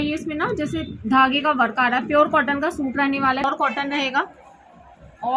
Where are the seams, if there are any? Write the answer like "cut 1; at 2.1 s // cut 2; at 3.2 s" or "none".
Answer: cut 1; at 3.4 s